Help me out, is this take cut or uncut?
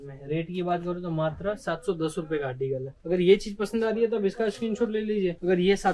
uncut